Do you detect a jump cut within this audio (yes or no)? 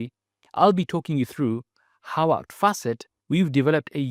yes